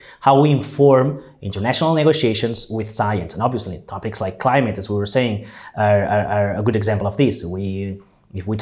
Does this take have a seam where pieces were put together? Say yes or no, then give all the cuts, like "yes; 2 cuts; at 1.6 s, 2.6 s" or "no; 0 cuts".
no; 0 cuts